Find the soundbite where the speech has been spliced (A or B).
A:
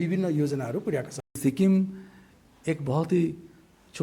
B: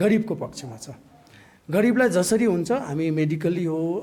A